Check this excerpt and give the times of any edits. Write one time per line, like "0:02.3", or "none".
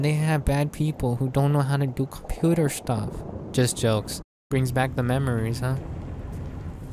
0:04.4